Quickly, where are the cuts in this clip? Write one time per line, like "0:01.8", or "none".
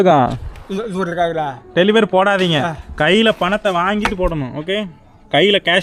none